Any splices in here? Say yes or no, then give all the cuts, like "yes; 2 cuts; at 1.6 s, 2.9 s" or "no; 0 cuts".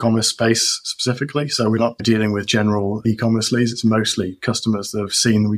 yes; 2 cuts; at 2.0 s, 3.0 s